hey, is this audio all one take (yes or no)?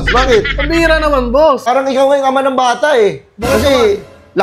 no